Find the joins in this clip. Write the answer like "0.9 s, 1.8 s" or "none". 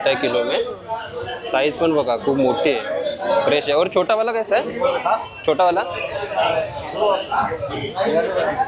none